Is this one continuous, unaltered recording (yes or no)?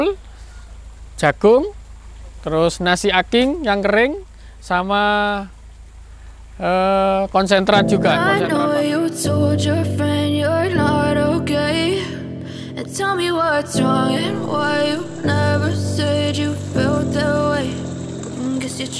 no